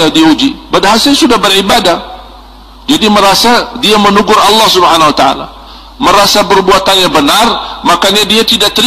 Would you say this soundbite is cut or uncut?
uncut